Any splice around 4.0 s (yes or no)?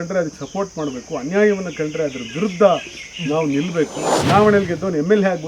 yes